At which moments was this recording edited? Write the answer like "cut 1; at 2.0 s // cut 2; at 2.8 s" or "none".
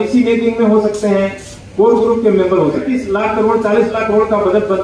cut 1; at 2.9 s